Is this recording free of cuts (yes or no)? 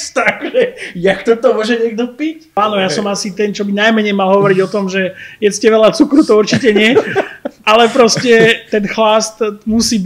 no